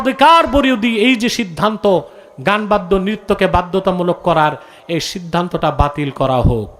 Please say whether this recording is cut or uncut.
uncut